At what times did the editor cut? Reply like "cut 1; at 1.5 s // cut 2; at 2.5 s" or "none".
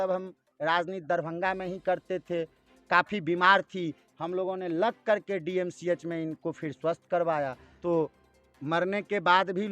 cut 1; at 7.7 s